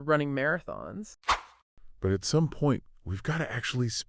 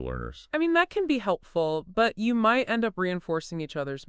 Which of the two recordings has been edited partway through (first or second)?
first